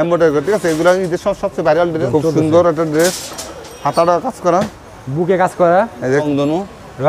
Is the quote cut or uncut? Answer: cut